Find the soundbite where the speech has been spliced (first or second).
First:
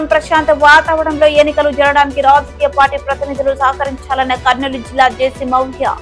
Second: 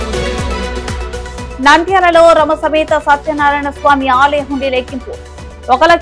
second